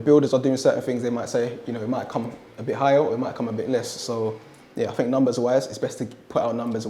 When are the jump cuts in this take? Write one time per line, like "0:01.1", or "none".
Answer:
none